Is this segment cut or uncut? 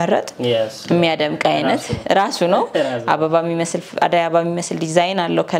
uncut